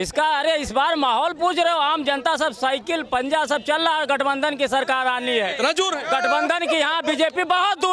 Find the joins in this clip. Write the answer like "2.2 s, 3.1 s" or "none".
none